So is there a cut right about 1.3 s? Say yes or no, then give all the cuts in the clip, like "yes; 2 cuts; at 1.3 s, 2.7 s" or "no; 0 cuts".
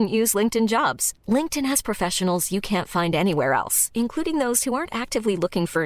no; 0 cuts